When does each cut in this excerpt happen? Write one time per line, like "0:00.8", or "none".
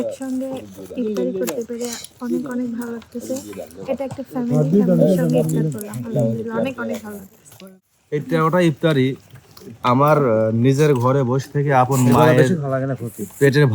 0:07.5